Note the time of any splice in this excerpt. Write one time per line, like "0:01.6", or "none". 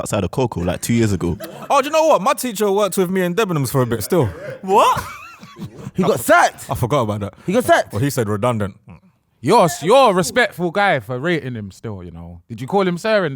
0:01.5